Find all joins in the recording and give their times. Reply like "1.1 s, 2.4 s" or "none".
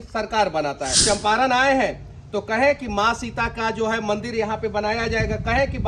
1.0 s